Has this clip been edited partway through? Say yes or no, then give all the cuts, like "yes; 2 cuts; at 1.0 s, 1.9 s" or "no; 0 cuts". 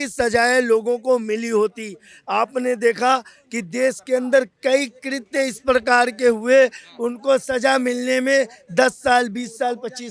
no; 0 cuts